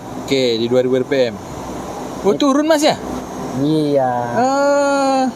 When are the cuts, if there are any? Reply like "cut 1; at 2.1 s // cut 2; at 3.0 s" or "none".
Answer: none